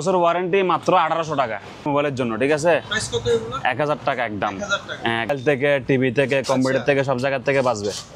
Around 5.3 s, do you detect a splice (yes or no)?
yes